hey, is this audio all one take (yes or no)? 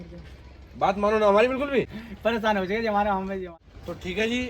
no